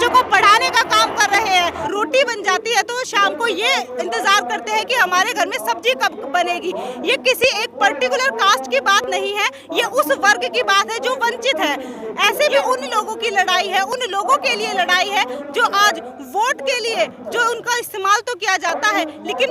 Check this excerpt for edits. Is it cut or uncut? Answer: cut